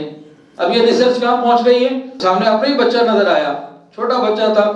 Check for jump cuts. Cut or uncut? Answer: cut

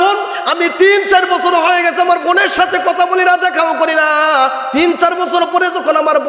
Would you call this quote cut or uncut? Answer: uncut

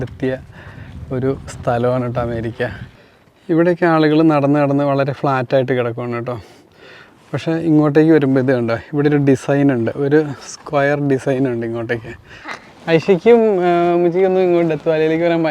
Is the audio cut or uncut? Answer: cut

